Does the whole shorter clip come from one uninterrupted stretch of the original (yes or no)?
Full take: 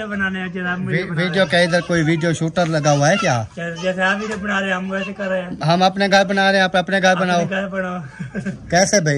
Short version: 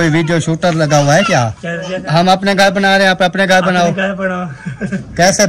no